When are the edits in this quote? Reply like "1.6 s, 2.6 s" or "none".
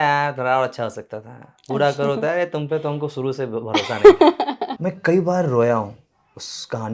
4.7 s